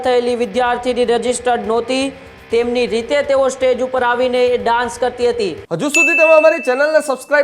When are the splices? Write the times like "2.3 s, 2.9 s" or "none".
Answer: 5.6 s